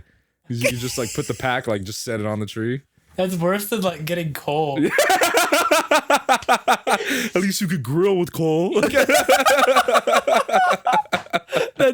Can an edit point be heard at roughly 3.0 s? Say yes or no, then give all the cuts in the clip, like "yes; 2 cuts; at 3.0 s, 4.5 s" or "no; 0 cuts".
no; 0 cuts